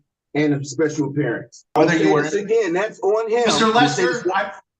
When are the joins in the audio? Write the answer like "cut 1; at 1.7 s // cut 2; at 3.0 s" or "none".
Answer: cut 1; at 1.8 s